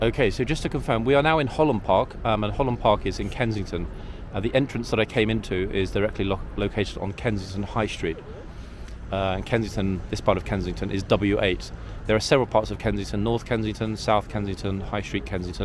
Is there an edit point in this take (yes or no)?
no